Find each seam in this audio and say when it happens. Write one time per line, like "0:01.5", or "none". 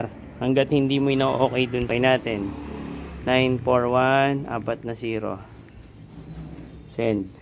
0:01.9